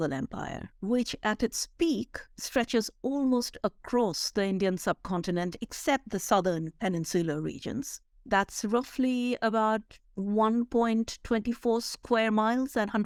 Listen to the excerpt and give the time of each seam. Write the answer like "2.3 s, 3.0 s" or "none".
none